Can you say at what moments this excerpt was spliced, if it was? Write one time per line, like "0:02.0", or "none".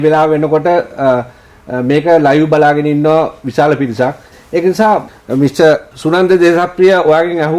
0:05.1
0:05.9